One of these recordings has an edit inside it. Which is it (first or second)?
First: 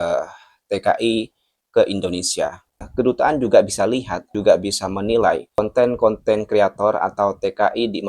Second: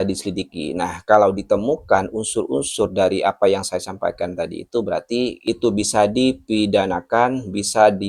first